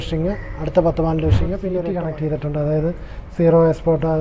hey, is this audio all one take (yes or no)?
no